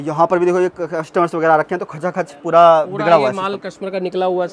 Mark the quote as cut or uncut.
uncut